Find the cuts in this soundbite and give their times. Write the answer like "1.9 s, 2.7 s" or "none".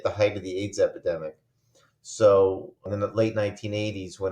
2.9 s